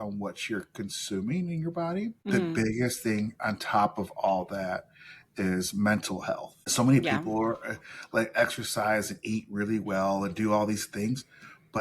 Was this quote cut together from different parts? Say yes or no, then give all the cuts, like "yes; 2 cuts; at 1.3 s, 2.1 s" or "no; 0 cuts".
yes; 2 cuts; at 2.2 s, 6.6 s